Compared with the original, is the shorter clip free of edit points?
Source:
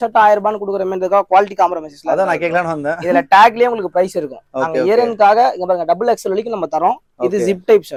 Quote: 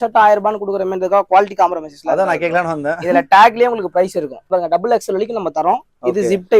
no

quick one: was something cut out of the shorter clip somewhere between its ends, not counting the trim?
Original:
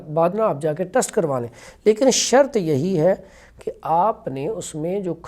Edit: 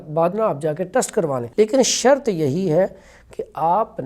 yes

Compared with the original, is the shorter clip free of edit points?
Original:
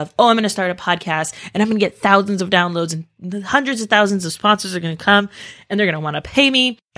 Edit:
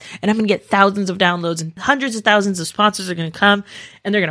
no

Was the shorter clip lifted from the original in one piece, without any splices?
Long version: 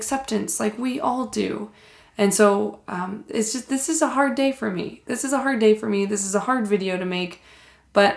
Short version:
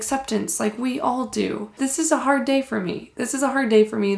no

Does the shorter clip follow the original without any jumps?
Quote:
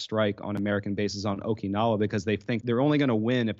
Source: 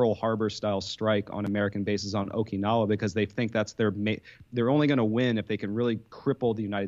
no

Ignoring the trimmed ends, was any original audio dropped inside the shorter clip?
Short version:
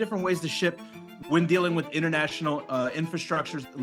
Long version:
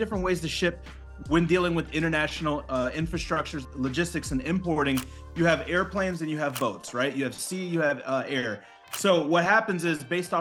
no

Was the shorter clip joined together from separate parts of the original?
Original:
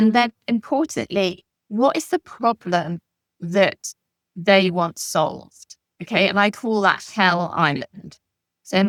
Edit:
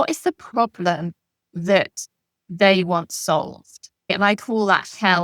yes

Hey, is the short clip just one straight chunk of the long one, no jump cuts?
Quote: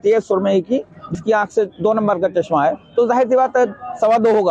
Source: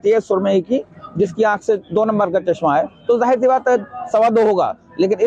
no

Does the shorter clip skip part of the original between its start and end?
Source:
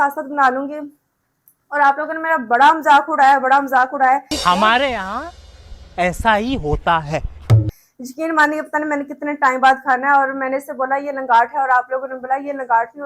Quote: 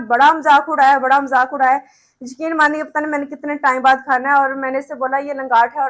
yes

